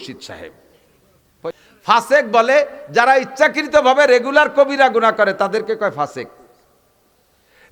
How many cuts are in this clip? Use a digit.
1